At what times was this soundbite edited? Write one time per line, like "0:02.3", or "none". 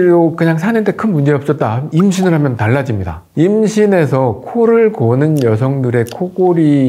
0:03.2